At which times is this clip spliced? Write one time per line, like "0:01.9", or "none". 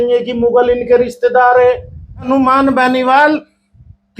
0:02.3